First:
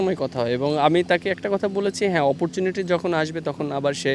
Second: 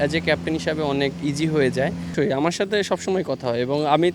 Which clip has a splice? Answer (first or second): second